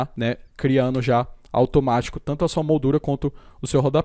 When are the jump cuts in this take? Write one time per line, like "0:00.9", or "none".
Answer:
none

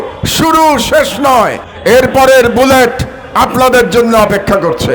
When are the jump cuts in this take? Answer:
0:01.7

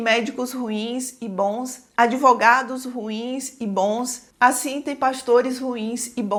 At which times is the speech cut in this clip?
none

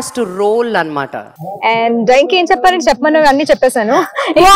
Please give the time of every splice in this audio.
0:01.4

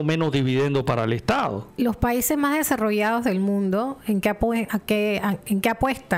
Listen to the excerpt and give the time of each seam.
none

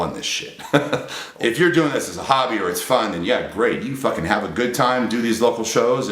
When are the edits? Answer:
0:01.2

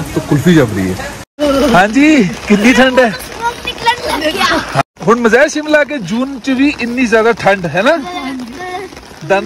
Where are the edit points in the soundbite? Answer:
0:01.4
0:04.8

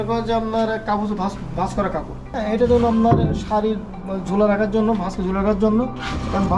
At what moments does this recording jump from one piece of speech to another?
0:02.3

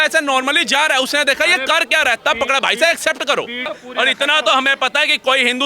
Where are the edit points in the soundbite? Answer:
0:03.7

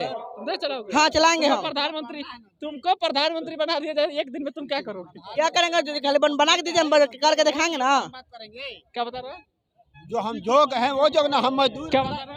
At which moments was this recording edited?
none

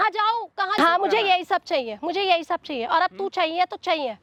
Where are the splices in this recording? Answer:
none

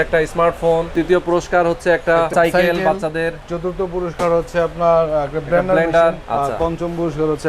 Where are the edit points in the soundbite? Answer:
0:00.9
0:02.3
0:06.2

